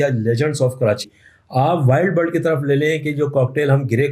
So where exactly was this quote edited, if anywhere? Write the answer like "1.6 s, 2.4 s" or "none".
1.1 s